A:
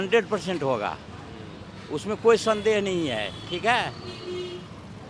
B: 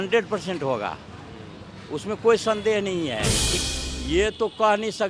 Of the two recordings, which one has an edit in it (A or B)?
B